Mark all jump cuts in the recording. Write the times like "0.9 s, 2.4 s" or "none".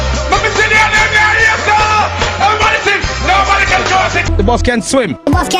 4.3 s